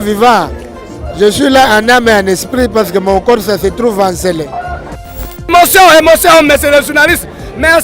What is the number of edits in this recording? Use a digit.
1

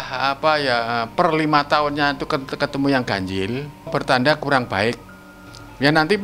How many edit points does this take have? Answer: 1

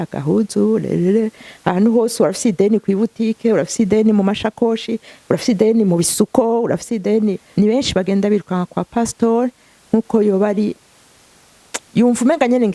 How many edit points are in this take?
1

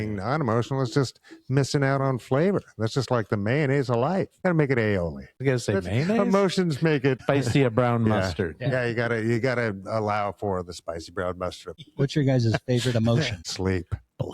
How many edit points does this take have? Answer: 5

